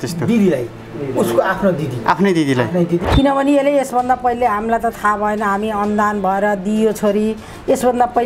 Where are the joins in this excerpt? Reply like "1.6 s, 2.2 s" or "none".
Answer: 3.1 s